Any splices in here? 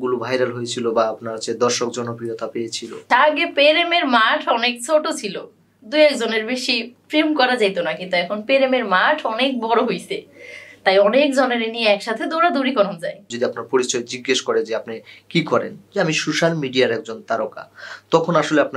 yes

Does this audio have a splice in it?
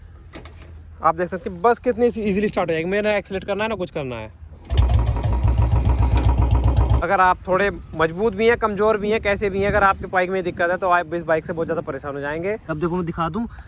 yes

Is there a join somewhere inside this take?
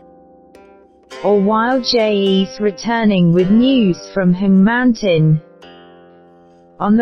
no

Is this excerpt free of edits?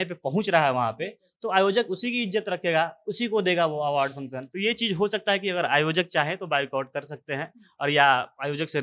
no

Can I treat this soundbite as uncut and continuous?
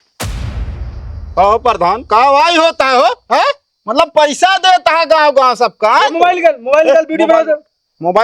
no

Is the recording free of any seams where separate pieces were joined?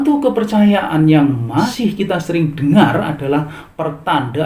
no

